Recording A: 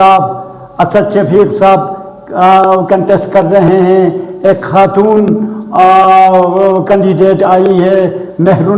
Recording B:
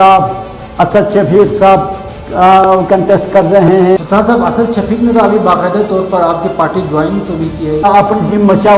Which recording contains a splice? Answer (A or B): B